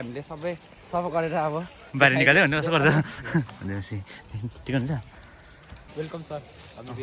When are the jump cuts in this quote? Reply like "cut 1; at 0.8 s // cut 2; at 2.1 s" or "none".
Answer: cut 1; at 5.8 s